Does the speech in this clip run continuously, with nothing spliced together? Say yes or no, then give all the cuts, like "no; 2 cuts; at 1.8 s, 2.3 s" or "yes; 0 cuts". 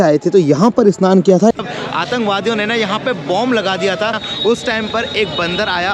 no; 2 cuts; at 1.5 s, 4.2 s